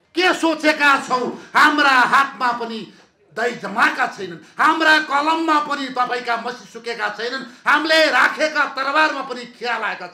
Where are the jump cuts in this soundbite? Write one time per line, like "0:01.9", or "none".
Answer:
none